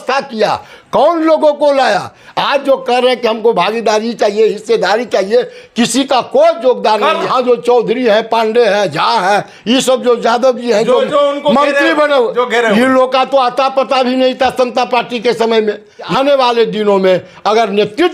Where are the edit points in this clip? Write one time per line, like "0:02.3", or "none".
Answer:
0:02.2
0:07.3
0:16.1